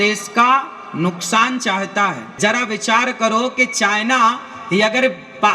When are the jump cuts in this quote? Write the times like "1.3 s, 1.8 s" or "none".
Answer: 2.2 s